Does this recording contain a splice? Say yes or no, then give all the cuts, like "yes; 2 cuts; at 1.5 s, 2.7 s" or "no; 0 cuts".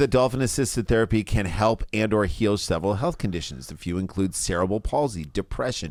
no; 0 cuts